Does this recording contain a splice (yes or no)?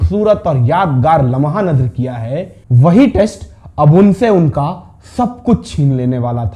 yes